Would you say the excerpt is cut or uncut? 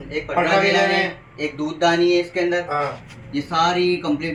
uncut